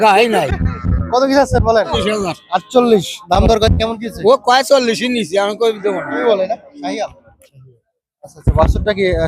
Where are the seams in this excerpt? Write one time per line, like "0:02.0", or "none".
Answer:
0:02.0
0:06.2

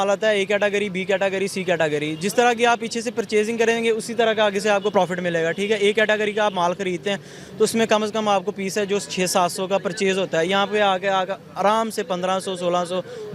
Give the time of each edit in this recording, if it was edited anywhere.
none

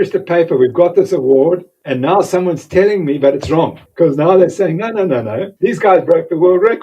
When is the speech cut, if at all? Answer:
0:01.8
0:03.8
0:05.5

